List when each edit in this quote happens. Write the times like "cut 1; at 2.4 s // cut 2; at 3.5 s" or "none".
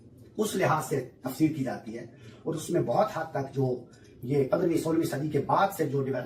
none